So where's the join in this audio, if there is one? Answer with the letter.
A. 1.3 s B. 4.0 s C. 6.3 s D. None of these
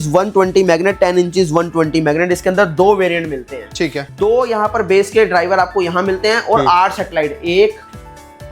B